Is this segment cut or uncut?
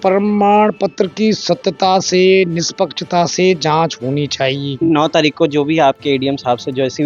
cut